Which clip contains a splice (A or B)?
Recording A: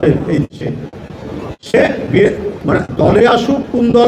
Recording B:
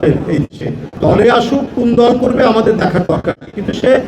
B